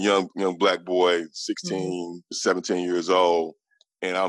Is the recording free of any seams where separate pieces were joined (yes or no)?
no